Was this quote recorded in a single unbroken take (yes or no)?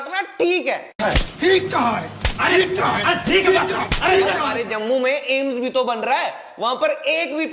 no